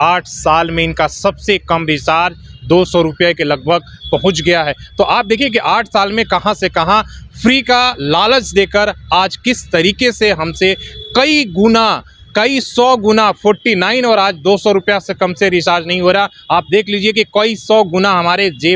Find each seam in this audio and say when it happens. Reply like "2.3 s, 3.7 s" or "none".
none